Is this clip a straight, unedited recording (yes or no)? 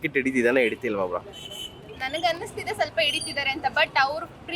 yes